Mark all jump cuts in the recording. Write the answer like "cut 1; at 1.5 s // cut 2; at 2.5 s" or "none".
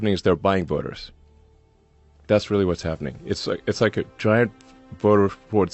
none